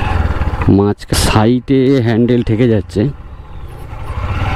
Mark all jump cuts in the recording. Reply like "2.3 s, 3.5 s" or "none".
1.1 s